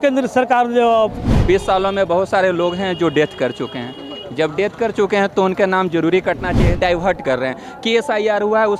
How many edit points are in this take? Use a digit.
2